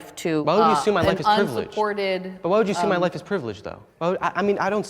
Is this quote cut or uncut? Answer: cut